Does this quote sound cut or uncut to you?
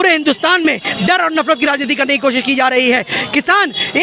uncut